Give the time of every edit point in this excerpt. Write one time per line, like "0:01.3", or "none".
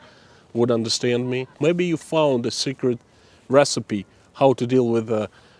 0:01.6